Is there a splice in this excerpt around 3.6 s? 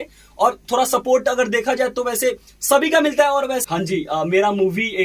yes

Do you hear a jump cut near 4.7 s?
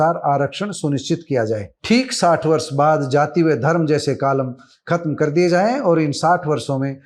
no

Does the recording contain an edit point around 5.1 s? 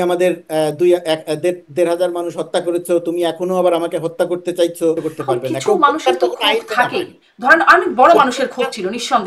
yes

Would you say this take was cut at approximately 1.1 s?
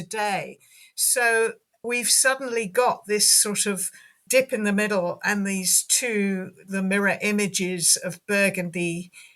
no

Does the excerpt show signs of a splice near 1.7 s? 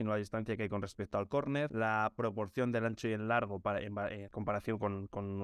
no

